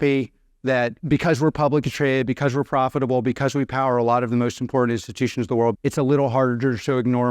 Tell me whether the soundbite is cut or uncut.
cut